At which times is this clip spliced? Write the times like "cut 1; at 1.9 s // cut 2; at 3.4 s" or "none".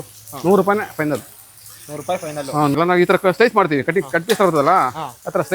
cut 1; at 2.7 s